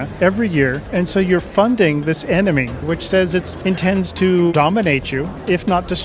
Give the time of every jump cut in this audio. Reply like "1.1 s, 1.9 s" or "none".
0.8 s, 2.8 s, 3.5 s, 4.9 s